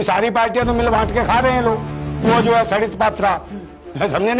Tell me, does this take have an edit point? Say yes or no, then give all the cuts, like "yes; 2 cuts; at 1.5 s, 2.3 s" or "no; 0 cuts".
yes; 1 cut; at 2.2 s